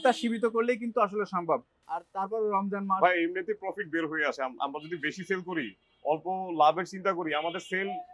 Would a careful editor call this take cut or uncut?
uncut